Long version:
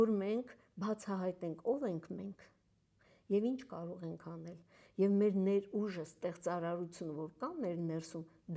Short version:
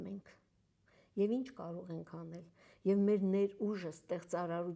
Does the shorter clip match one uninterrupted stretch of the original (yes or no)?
yes